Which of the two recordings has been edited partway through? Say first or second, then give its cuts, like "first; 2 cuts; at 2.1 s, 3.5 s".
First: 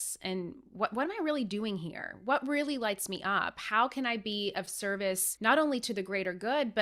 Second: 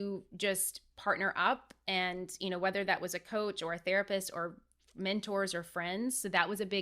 first; 1 cut; at 5.3 s